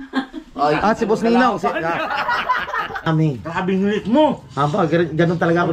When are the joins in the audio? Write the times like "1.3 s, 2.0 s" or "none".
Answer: 3.1 s